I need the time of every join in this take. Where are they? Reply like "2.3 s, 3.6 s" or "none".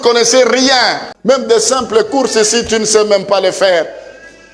1.2 s